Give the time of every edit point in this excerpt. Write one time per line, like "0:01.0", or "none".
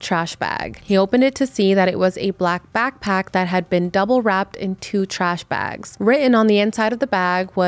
0:05.8